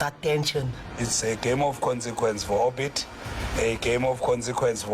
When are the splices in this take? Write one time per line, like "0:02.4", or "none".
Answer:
0:01.1